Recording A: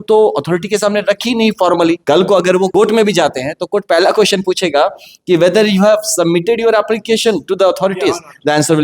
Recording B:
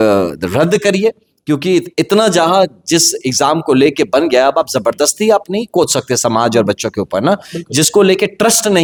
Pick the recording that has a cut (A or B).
A